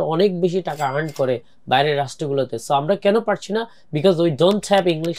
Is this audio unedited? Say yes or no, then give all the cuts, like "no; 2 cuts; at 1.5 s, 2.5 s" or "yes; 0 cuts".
yes; 0 cuts